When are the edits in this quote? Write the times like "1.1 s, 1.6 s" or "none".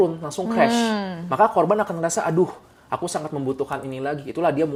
none